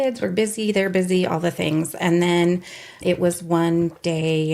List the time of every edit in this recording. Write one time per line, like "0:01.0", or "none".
0:03.0